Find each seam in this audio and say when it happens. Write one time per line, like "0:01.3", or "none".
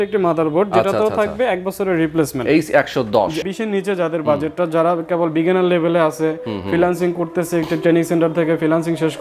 0:03.4